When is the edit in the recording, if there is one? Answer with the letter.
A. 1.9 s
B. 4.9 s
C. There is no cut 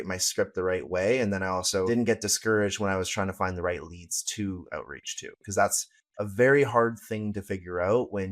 A